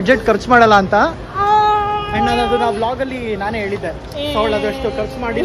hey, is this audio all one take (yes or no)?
yes